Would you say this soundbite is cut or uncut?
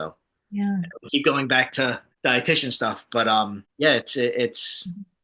cut